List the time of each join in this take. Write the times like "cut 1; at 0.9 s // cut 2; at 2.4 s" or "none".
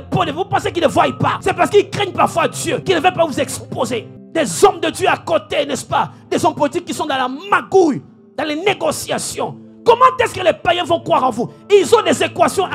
cut 1; at 1.4 s // cut 2; at 2.8 s // cut 3; at 4.2 s